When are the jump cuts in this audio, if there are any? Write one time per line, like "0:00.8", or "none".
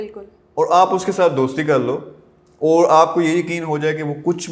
none